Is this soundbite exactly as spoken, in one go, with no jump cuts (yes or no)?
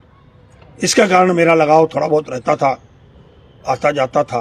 yes